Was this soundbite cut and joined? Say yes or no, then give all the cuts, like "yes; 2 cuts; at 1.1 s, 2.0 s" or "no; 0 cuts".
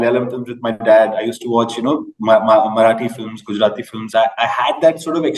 no; 0 cuts